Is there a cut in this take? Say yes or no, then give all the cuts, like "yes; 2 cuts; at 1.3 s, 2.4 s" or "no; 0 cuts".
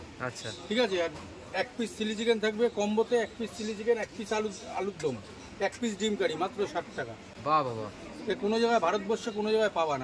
no; 0 cuts